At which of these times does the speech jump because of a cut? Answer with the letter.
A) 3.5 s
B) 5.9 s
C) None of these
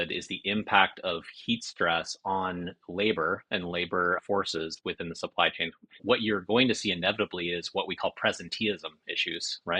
B